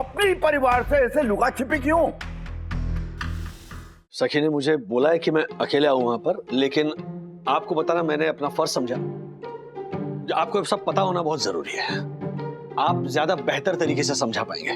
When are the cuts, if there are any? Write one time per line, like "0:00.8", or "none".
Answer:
0:03.7

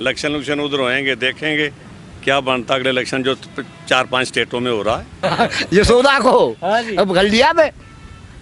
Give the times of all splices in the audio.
0:05.2

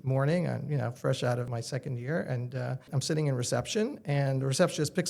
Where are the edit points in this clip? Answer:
0:01.5
0:02.9

